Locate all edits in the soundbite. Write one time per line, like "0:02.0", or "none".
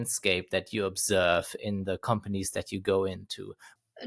0:01.5